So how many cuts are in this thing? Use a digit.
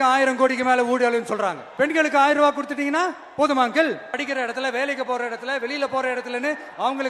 2